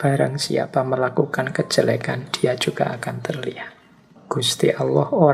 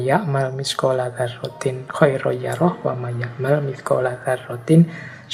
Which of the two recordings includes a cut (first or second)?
first